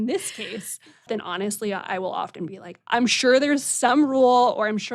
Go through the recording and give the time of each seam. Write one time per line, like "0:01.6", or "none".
0:01.1